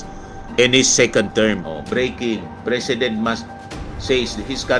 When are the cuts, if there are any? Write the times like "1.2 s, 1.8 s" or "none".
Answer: 1.6 s